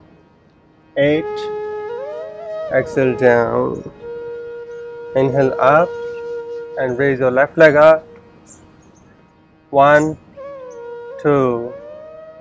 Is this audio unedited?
no; 2 cuts; at 1.3 s, 2.7 s

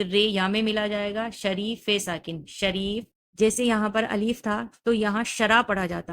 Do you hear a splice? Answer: yes; 1 cut; at 3.2 s

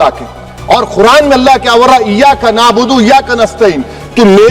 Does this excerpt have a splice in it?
no; 0 cuts

